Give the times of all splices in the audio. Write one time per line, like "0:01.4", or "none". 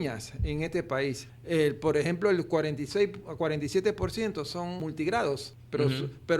0:01.3
0:04.8
0:05.5